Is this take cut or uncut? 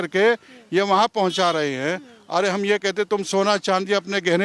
uncut